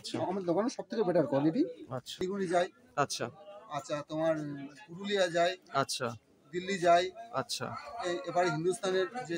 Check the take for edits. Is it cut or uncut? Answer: cut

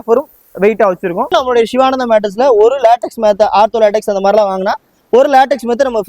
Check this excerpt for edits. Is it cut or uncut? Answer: cut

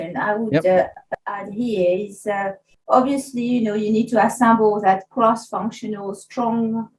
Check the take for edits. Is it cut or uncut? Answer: uncut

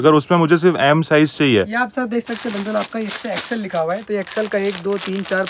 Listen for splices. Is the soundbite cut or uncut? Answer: uncut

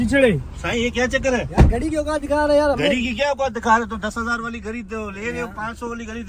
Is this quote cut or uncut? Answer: uncut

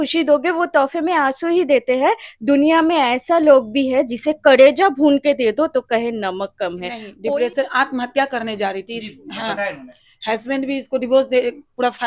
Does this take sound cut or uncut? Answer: cut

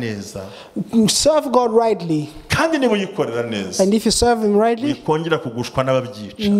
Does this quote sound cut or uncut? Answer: uncut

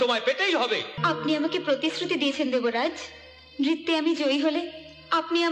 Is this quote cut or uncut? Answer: cut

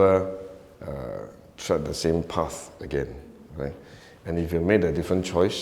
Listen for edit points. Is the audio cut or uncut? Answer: uncut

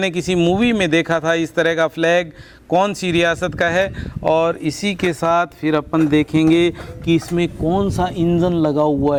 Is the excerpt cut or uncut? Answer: uncut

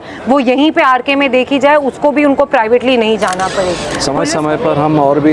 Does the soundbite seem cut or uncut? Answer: cut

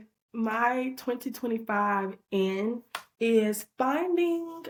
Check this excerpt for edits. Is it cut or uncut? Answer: uncut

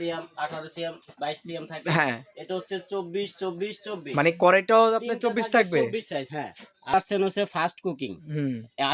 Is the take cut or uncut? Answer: cut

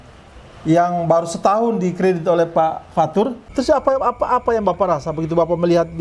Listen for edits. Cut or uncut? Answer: cut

